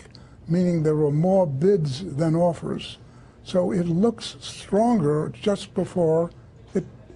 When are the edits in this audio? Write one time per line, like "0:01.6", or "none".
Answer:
0:02.7